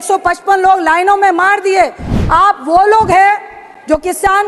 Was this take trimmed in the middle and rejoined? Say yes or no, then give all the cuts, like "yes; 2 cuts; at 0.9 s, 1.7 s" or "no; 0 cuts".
yes; 1 cut; at 2.0 s